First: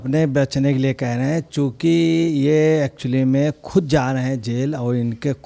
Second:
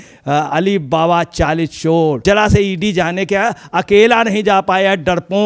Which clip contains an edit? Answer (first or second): second